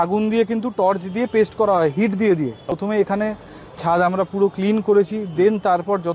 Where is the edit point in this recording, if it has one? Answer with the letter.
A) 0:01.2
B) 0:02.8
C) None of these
B